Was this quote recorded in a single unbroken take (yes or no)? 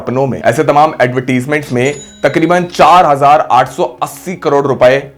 yes